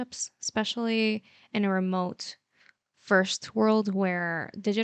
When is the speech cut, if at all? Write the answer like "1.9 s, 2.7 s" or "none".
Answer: none